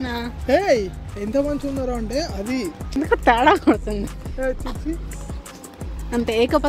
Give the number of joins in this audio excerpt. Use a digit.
1